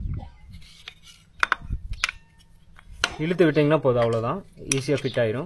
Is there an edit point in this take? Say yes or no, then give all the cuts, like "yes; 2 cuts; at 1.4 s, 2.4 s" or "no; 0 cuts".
no; 0 cuts